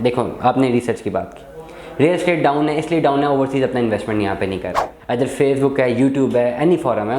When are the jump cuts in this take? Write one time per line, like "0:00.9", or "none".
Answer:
0:05.0